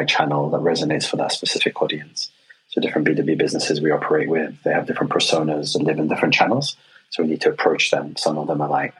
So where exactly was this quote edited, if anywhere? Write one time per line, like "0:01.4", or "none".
none